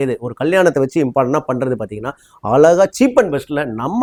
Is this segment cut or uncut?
uncut